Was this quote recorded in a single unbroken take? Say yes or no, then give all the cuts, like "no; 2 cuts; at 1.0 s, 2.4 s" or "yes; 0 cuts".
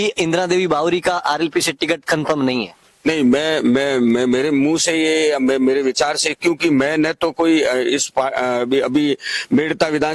yes; 0 cuts